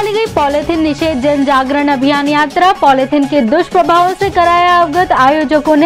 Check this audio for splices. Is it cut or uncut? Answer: uncut